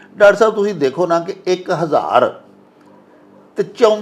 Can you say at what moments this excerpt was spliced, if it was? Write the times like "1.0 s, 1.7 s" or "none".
none